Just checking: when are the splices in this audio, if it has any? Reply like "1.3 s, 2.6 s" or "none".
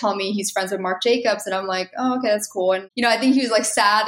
2.9 s